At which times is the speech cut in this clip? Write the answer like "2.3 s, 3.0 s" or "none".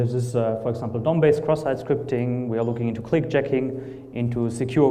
1.4 s

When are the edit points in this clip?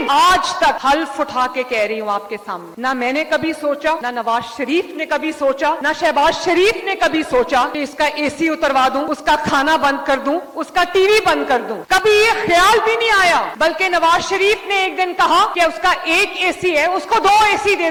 none

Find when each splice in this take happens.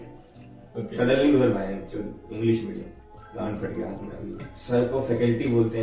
3.0 s, 4.5 s

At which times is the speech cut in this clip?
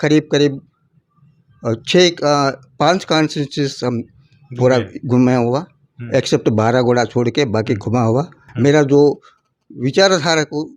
8.4 s

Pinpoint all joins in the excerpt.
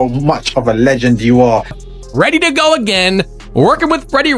1.8 s

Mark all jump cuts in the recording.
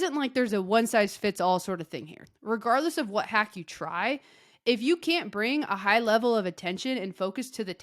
2.2 s

